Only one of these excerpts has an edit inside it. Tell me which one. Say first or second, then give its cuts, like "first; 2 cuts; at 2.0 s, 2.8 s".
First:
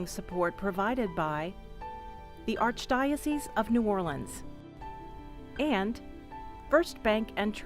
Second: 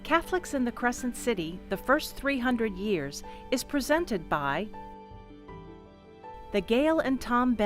second; 2 cuts; at 4.7 s, 6.2 s